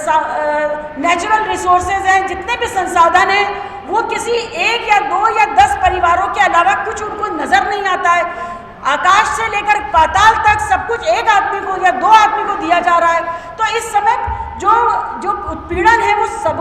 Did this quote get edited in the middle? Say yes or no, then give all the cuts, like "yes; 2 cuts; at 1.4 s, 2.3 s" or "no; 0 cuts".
no; 0 cuts